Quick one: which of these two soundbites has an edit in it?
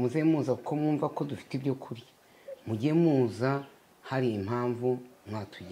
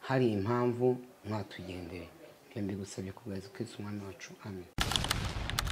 second; 1 cut; at 4.8 s

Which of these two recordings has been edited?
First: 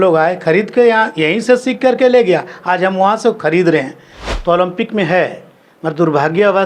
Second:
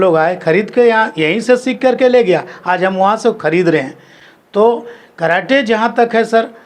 first; 1 cut; at 4.3 s

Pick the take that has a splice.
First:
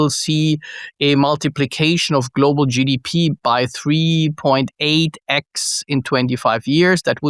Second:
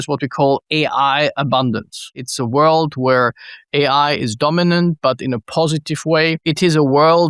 second; 2 cuts; at 2.2 s, 6.4 s

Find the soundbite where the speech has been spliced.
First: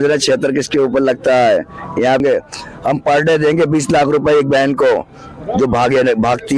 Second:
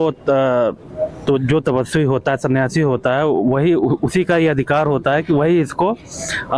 first; 1 cut; at 2.2 s

